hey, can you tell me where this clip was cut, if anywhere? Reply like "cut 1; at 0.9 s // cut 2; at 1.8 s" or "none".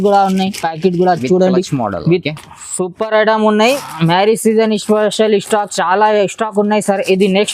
cut 1; at 3.8 s